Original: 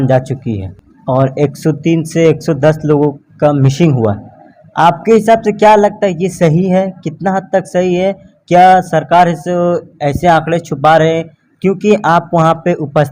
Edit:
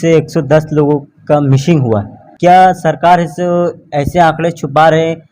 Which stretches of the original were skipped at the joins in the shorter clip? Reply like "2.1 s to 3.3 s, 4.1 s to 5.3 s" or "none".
4.3 s to 8.3 s